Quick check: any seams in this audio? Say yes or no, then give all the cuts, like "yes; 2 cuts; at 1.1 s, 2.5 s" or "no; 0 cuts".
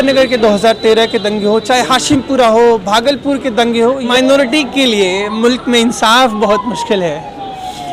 yes; 1 cut; at 4.1 s